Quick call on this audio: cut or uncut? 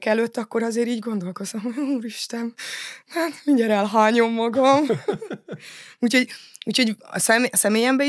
uncut